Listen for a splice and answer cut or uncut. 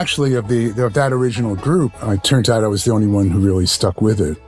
cut